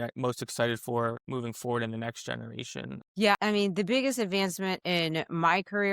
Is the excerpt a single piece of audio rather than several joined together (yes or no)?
no